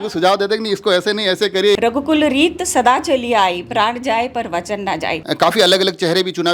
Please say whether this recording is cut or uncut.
cut